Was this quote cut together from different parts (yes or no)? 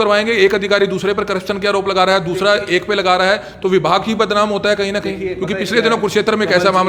no